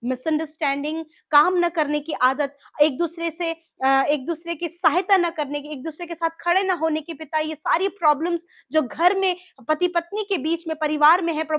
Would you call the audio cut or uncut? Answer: uncut